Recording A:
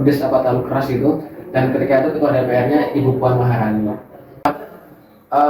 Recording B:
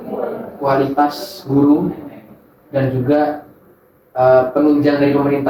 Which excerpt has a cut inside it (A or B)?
A